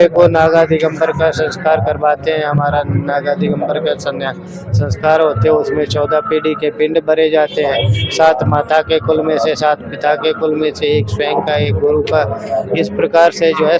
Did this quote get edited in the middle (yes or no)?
no